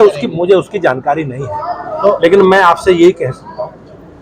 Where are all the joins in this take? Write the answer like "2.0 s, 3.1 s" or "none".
none